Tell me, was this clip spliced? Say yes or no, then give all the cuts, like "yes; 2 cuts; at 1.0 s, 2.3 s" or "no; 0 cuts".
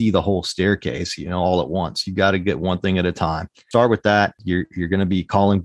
yes; 2 cuts; at 3.6 s, 4.4 s